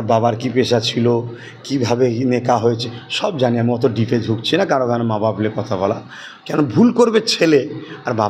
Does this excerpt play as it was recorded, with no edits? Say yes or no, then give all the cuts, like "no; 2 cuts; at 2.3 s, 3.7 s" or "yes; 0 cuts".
yes; 0 cuts